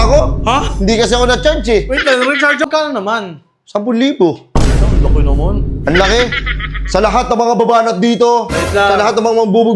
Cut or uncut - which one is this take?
cut